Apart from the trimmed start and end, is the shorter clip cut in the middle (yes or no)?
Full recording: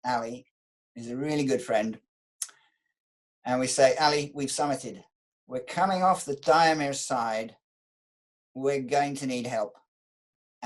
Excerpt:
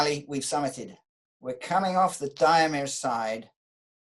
no